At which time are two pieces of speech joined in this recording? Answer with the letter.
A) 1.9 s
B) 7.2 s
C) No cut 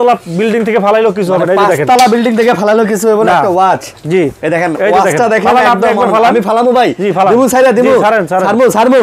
C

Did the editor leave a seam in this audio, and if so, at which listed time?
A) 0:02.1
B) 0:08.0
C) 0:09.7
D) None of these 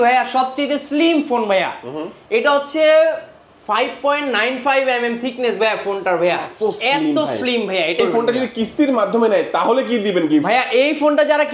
B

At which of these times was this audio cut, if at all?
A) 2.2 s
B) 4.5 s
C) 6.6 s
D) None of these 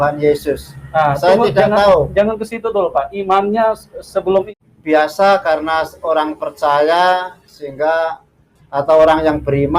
B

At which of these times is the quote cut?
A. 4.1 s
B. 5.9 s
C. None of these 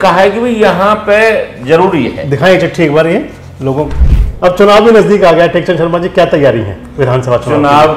A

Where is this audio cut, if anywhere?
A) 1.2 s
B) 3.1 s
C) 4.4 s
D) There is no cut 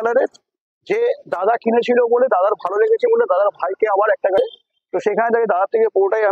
C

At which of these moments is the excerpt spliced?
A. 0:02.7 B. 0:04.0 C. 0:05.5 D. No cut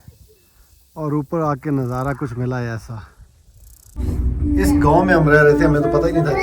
B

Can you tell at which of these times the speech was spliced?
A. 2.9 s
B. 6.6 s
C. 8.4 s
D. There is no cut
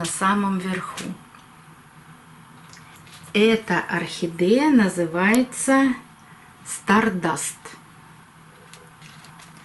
A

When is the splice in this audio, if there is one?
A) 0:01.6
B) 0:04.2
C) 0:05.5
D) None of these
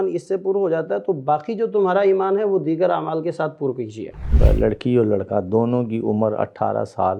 B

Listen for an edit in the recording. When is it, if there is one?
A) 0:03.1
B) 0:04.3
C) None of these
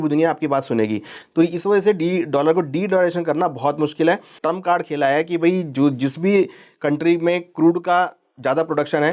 B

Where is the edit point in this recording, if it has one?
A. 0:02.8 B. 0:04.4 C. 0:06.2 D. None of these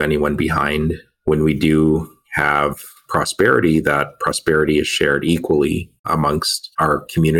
C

